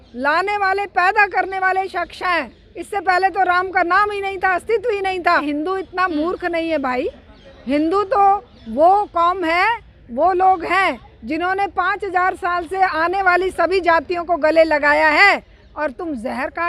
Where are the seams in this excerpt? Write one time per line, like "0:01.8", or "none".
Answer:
0:05.4

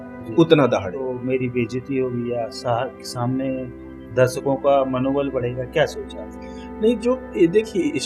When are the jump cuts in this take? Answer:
0:01.0

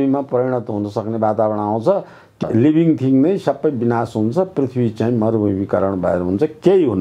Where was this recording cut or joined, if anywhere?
0:02.2

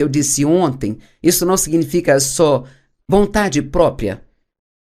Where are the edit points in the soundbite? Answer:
0:02.3

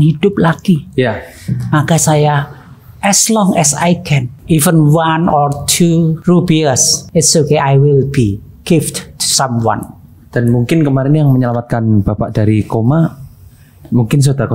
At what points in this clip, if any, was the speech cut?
0:04.3
0:06.2
0:06.9

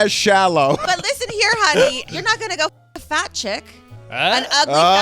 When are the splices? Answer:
0:00.8
0:02.0

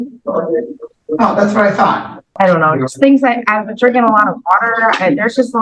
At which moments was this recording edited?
0:02.3

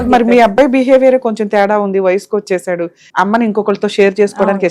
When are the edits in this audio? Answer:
0:03.0

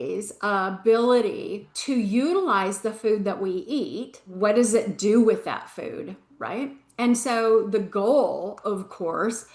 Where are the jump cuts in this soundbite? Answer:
0:01.7
0:04.2

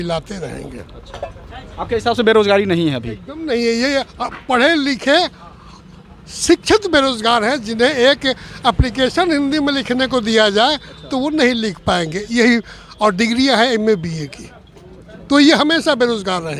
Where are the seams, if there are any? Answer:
none

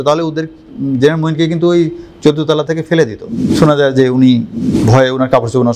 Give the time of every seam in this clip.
0:03.4

